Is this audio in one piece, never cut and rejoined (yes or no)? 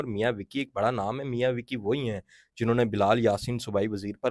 yes